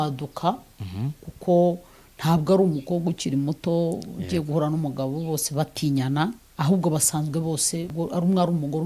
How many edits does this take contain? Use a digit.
2